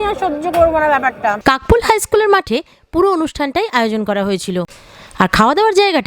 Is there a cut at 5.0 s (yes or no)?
no